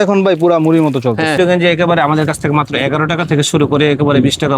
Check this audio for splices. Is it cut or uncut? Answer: cut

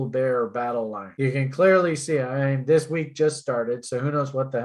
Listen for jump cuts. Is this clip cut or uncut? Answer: cut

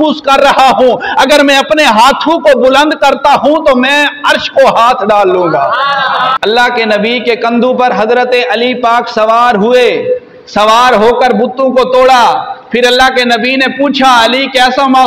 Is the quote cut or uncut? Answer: cut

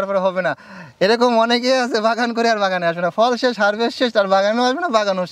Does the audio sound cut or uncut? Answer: uncut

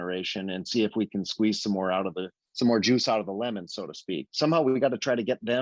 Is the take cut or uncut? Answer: cut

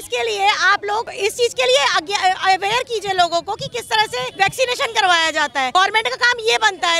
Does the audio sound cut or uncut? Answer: cut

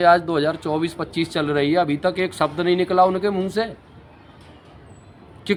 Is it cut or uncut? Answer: uncut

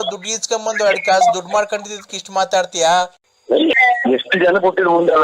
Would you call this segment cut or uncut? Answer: cut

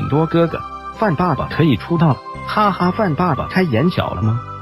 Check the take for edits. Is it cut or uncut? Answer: uncut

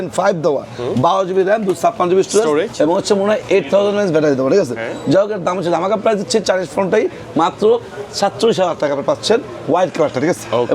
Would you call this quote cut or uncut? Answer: uncut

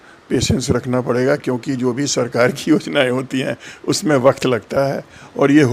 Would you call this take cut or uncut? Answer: uncut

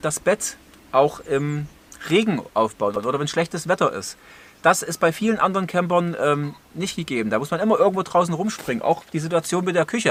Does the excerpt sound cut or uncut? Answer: uncut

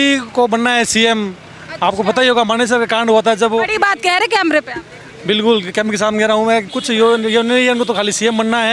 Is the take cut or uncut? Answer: cut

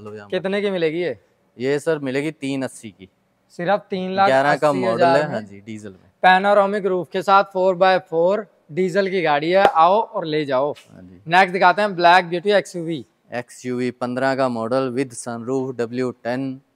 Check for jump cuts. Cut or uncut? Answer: uncut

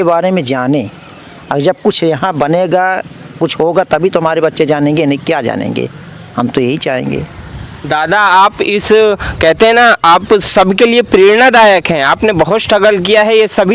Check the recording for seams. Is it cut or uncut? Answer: uncut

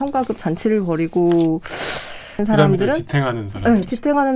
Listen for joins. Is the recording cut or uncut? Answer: cut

